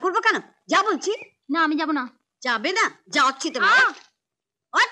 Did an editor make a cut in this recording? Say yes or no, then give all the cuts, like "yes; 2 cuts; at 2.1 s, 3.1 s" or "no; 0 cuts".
no; 0 cuts